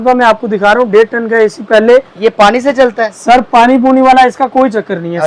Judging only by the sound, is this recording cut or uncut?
uncut